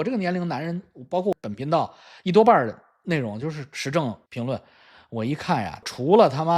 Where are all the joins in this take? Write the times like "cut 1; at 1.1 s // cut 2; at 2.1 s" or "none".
cut 1; at 1.3 s // cut 2; at 5.8 s